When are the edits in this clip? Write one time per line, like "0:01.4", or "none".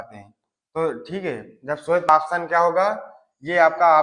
0:02.1